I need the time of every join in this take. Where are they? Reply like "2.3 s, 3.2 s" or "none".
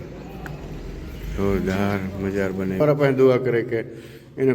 2.8 s